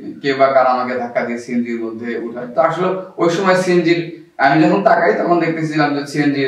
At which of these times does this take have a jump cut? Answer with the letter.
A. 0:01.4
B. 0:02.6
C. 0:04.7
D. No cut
D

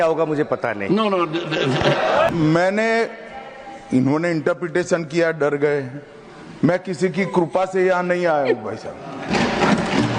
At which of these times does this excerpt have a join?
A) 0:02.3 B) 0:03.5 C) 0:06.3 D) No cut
A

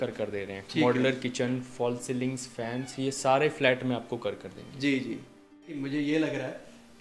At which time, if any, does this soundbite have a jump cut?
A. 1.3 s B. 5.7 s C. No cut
B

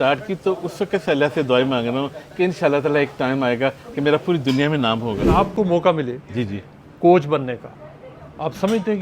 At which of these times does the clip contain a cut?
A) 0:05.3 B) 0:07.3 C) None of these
A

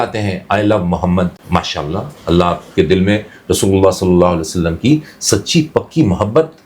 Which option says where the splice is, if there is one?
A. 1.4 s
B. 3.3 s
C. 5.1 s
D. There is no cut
A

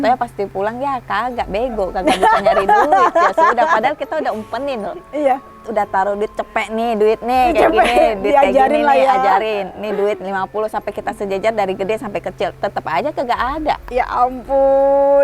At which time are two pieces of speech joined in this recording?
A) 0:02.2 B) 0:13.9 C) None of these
B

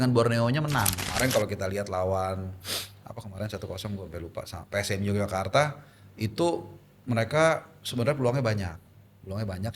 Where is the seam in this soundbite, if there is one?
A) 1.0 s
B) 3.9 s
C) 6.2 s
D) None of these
A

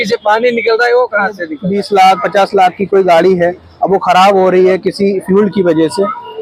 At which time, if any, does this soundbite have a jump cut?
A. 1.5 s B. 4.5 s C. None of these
A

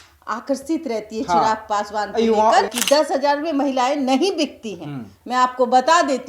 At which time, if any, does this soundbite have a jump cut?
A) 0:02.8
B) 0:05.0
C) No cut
A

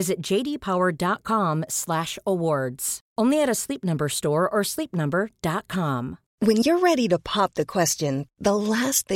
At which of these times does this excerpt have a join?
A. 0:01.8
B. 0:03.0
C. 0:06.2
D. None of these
C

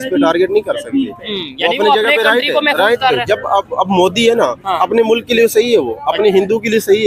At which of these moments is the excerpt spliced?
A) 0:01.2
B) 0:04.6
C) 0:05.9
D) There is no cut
D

